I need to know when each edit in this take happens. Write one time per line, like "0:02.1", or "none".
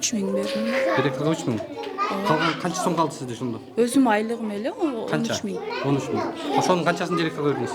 none